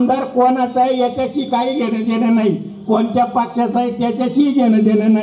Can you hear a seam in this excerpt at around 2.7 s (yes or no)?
no